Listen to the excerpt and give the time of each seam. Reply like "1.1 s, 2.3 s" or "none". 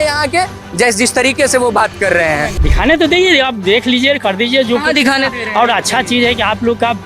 2.6 s